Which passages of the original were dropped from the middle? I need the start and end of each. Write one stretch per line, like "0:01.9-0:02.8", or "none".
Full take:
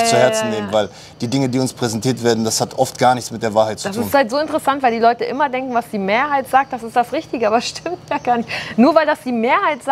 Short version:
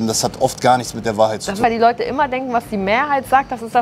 0:03.9-0:04.8